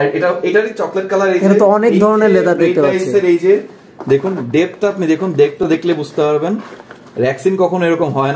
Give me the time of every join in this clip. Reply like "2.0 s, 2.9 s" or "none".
none